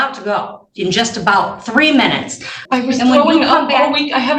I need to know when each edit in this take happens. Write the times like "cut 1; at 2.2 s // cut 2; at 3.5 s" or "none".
cut 1; at 2.5 s